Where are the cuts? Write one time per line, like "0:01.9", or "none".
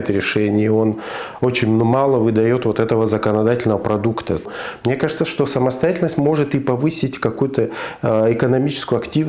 0:04.4